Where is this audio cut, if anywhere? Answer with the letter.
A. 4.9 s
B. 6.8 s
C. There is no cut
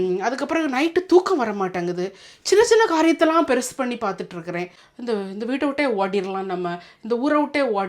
A